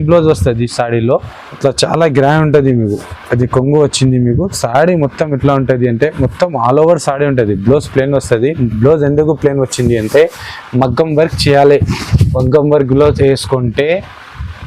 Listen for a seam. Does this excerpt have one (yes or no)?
yes